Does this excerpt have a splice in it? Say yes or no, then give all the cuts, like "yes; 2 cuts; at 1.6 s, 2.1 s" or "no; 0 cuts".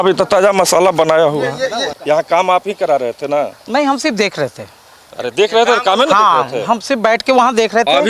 yes; 1 cut; at 1.9 s